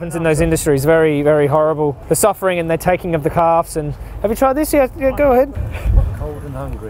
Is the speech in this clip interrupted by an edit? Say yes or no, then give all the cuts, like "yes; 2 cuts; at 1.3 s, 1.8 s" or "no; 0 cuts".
no; 0 cuts